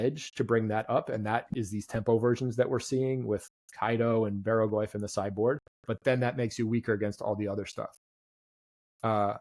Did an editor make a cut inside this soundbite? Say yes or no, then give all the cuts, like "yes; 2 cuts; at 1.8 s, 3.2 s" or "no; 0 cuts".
no; 0 cuts